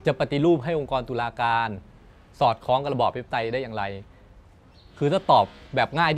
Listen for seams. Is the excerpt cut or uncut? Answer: uncut